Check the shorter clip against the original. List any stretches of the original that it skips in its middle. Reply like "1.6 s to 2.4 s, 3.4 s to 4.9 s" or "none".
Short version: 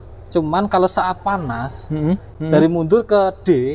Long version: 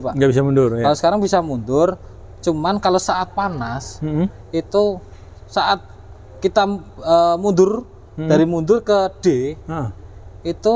4.4 s to 8.1 s